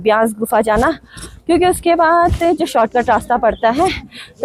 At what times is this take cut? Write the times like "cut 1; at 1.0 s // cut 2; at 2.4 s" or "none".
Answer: none

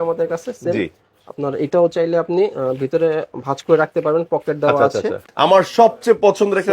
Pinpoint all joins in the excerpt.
cut 1; at 5.3 s

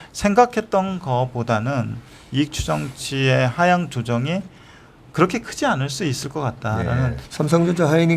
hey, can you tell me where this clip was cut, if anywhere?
cut 1; at 7.2 s

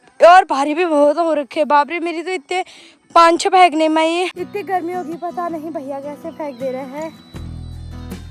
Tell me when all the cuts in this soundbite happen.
none

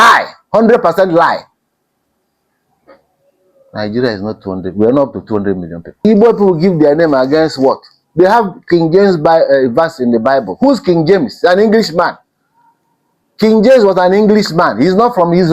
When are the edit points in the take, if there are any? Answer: cut 1; at 6.0 s

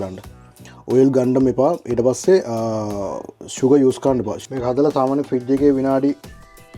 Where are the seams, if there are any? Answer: cut 1; at 4.3 s

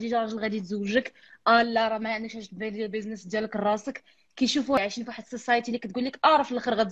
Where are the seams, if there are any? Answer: cut 1; at 4.8 s

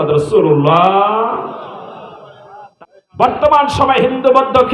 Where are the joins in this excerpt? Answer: cut 1; at 2.6 s

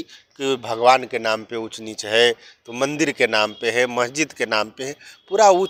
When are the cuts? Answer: none

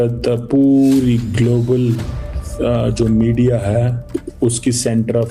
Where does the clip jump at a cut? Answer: none

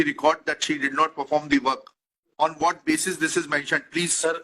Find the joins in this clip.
cut 1; at 2.3 s

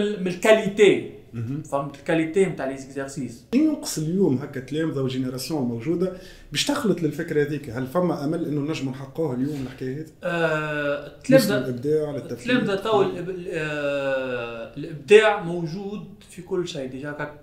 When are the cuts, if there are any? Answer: cut 1; at 3.4 s

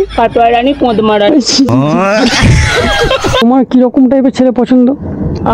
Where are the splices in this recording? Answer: cut 1; at 3.4 s

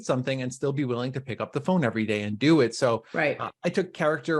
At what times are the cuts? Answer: none

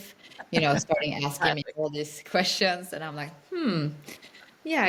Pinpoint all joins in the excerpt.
none

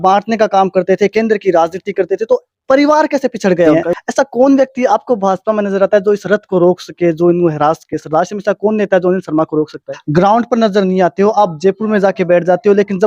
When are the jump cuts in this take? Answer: cut 1; at 3.8 s // cut 2; at 9.9 s

